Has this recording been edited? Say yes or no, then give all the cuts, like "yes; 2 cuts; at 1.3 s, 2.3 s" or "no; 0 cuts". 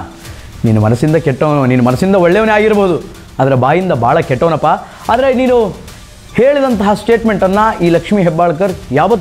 no; 0 cuts